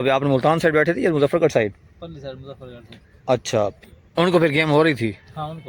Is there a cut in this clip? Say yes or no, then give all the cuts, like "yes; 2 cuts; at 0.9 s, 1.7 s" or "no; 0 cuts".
yes; 1 cut; at 3.8 s